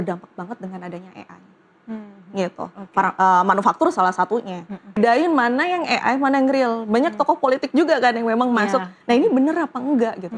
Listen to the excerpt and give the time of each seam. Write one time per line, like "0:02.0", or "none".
0:05.0